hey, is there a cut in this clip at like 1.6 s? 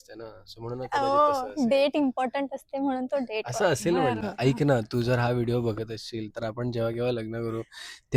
no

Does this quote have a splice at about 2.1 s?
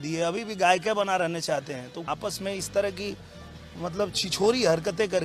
yes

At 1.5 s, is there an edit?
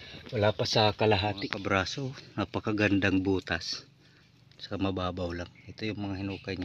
yes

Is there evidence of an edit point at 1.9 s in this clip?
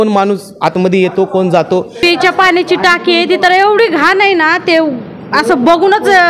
yes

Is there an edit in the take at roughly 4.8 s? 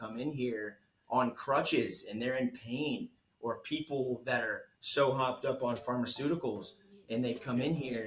no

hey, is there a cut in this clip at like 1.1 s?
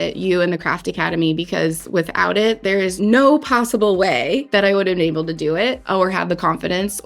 no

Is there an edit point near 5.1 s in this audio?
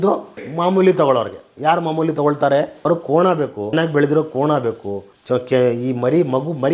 no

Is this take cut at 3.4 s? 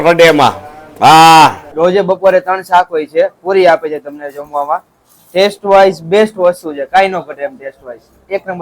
no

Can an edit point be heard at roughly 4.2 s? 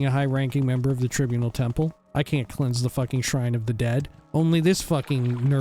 yes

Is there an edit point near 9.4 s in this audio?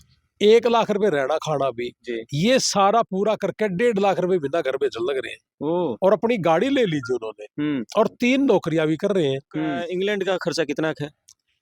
yes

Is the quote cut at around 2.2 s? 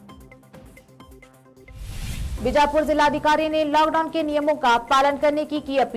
yes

